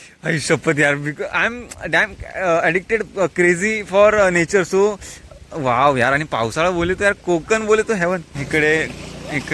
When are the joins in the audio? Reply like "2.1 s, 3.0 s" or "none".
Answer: 8.3 s